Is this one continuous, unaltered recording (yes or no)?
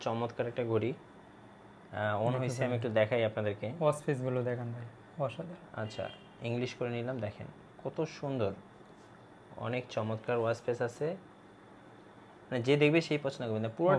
yes